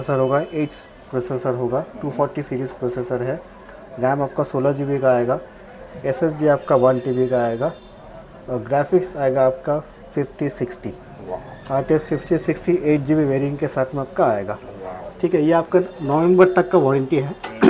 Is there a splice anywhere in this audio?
no; 0 cuts

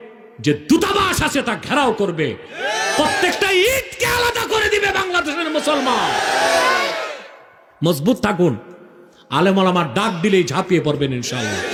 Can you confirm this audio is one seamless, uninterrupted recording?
yes; 0 cuts

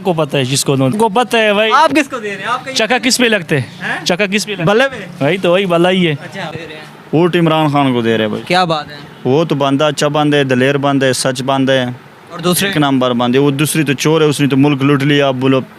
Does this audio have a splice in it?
yes; 2 cuts; at 0.9 s, 6.5 s

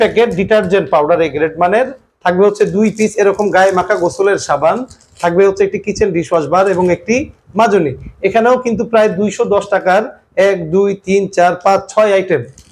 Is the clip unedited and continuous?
yes; 0 cuts

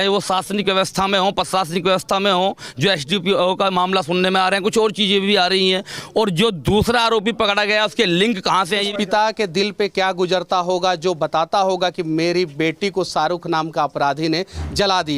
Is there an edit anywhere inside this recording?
yes; 1 cut; at 8.9 s

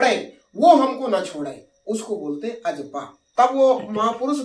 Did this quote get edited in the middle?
yes; 1 cut; at 3.2 s

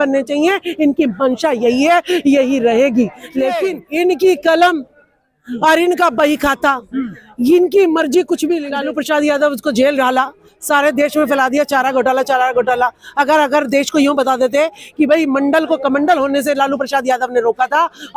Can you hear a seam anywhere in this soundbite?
yes; 2 cuts; at 3.8 s, 8.7 s

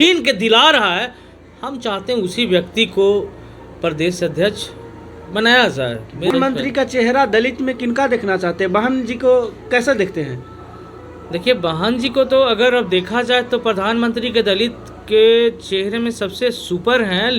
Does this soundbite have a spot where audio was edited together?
yes; 1 cut; at 6.3 s

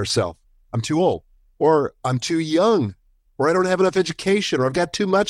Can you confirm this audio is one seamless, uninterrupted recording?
yes; 0 cuts

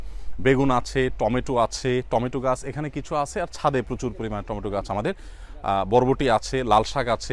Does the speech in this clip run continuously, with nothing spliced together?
yes; 0 cuts

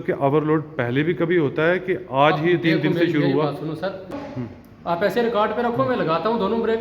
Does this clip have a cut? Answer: yes; 1 cut; at 4.2 s

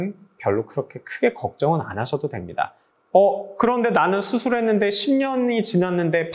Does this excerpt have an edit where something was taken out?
yes; 1 cut; at 2.8 s

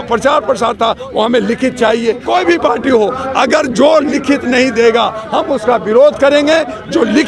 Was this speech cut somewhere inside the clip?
yes; 1 cut; at 2.2 s

